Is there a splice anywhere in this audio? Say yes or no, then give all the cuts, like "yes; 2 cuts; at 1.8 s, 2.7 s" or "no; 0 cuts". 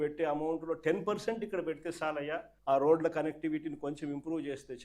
yes; 1 cut; at 2.5 s